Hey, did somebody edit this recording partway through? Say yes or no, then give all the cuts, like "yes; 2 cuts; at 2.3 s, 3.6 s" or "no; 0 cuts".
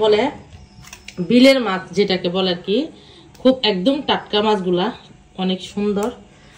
no; 0 cuts